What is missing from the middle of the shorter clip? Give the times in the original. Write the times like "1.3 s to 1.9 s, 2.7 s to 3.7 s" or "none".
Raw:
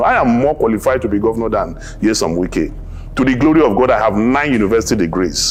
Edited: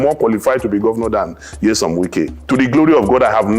2.8 s to 3.0 s